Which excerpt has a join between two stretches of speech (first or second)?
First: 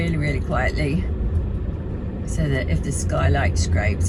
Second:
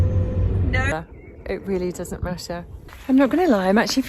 second